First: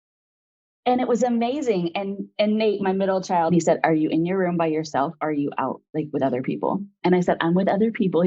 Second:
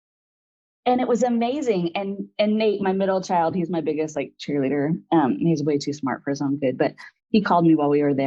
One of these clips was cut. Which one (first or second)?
first